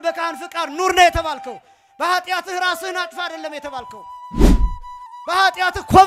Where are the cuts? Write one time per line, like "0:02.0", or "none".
none